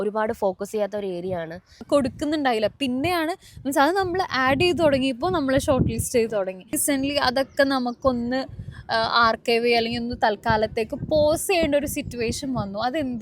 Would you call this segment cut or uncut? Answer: cut